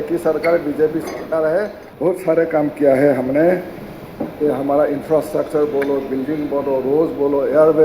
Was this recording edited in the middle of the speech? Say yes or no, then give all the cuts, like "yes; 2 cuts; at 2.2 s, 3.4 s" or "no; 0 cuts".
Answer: yes; 1 cut; at 1.8 s